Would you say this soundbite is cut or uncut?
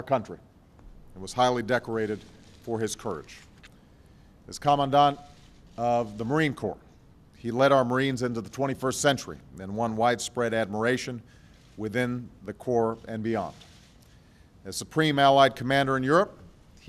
cut